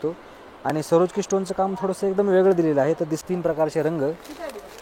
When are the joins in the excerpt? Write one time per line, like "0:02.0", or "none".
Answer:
0:03.2